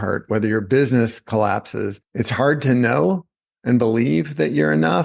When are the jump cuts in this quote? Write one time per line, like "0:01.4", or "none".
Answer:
0:02.0